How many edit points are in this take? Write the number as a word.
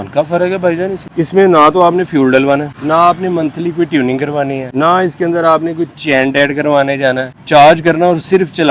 four